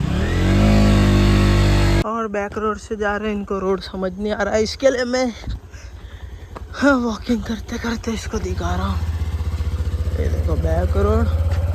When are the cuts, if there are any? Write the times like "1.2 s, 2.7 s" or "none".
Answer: 2.0 s